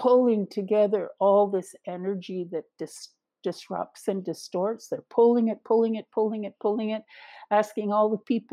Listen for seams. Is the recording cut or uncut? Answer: uncut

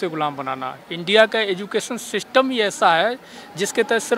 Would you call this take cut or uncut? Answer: uncut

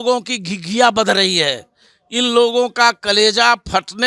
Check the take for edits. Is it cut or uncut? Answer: uncut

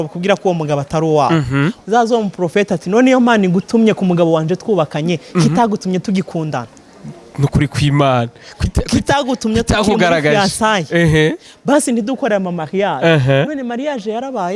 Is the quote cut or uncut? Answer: uncut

